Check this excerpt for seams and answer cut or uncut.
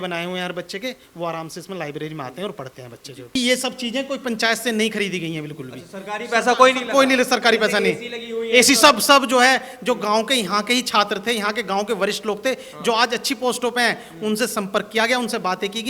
cut